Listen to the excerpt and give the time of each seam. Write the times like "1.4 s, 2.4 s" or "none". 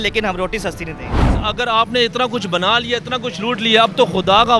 1.4 s